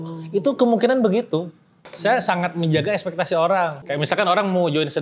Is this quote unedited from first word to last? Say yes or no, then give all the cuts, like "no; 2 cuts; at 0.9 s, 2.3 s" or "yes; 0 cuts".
no; 2 cuts; at 1.9 s, 3.8 s